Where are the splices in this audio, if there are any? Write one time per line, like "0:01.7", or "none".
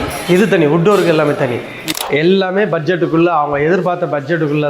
0:02.0